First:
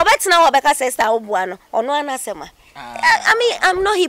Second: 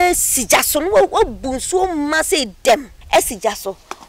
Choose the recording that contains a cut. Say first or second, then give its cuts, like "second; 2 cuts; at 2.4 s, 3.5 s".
second; 1 cut; at 2.9 s